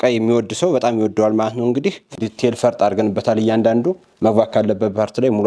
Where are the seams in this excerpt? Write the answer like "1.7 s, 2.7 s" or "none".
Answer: 2.1 s